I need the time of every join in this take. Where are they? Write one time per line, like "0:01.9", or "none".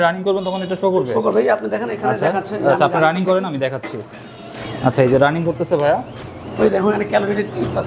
none